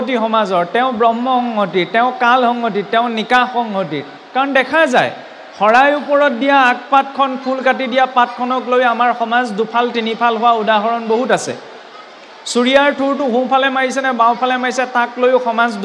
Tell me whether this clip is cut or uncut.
uncut